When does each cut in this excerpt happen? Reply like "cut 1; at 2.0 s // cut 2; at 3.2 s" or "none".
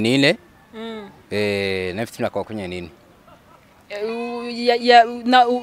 none

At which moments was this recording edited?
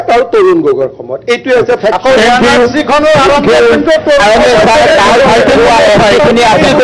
none

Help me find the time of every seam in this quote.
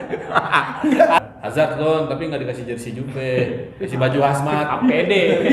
cut 1; at 1.2 s

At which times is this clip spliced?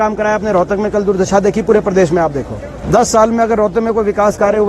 cut 1; at 2.7 s

